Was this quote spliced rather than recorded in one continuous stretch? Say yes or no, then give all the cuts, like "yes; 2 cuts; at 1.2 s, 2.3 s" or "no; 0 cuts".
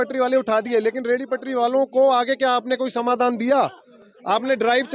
no; 0 cuts